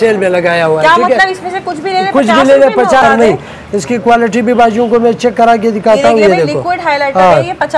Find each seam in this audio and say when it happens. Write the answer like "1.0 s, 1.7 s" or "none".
3.0 s